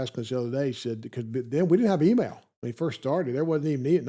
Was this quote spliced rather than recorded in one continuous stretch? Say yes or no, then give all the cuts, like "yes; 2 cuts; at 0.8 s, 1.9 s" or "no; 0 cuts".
no; 0 cuts